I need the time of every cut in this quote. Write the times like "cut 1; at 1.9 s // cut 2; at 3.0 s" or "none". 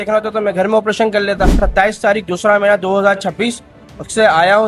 cut 1; at 1.6 s